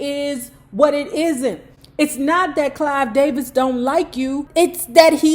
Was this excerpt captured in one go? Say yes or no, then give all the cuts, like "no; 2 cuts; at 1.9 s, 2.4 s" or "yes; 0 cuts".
no; 1 cut; at 4.4 s